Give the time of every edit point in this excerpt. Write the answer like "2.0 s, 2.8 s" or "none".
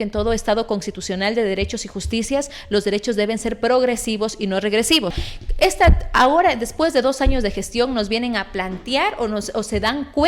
5.3 s